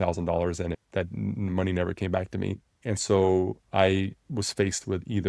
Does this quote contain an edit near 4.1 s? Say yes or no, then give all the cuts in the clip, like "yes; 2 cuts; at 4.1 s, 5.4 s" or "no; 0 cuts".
no; 2 cuts; at 0.8 s, 2.8 s